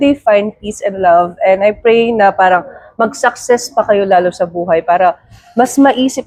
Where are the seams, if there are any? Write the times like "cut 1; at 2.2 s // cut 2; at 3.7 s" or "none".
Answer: none